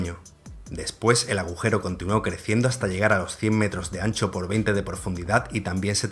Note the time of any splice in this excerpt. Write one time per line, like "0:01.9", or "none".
none